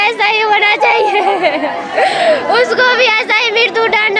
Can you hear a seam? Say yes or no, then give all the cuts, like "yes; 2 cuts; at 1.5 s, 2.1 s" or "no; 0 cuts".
no; 0 cuts